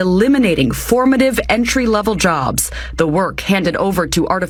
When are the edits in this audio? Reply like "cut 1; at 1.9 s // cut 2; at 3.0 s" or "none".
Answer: none